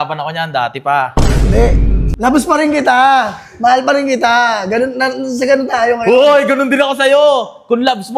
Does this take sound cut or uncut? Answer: cut